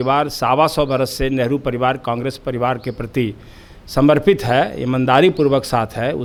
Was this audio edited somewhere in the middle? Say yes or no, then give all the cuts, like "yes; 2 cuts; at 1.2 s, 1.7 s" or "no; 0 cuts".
no; 0 cuts